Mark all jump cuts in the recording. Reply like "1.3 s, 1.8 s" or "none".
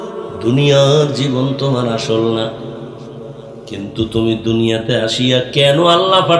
none